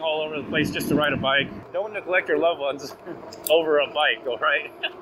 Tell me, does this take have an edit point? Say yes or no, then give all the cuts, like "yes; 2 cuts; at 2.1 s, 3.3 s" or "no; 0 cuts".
yes; 1 cut; at 1.6 s